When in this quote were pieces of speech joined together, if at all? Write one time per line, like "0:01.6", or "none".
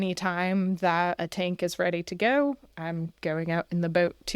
0:01.2